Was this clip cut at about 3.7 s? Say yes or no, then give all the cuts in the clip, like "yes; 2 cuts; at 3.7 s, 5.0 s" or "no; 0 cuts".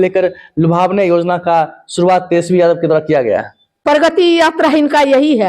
yes; 1 cut; at 3.7 s